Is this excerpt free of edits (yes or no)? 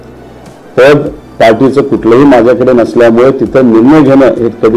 yes